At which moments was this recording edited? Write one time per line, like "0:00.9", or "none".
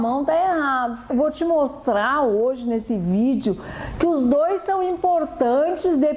0:01.0